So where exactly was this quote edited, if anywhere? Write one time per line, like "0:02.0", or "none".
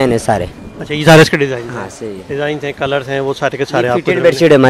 none